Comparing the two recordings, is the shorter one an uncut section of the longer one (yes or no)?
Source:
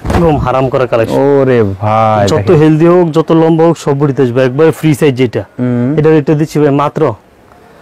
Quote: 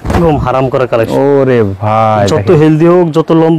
yes